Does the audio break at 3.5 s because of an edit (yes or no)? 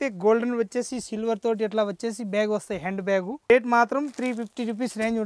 yes